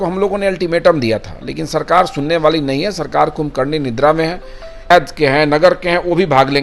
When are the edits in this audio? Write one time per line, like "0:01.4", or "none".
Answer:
0:04.9